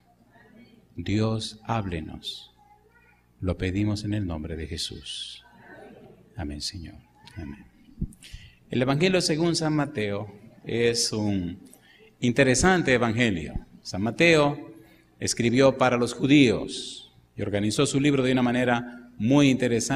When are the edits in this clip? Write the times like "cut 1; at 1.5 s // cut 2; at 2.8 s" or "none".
cut 1; at 10.9 s

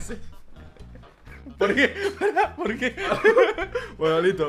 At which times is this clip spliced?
none

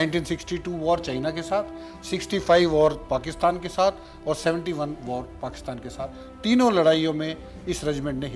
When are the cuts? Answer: none

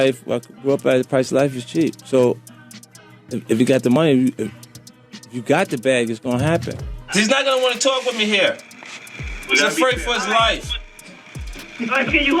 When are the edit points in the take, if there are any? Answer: cut 1; at 7.0 s

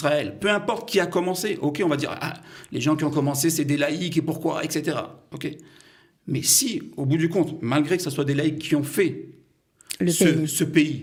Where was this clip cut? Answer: none

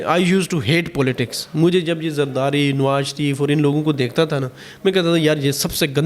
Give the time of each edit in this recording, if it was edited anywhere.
none

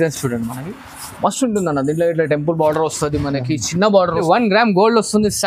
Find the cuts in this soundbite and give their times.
cut 1; at 4.2 s

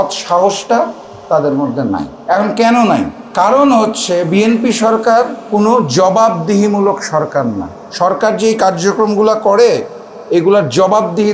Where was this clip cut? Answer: cut 1; at 2.1 s // cut 2; at 3.2 s // cut 3; at 5.4 s

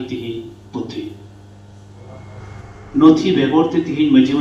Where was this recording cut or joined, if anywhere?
cut 1; at 2.4 s

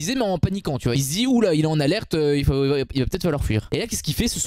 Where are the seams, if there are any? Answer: cut 1; at 0.9 s // cut 2; at 3.7 s

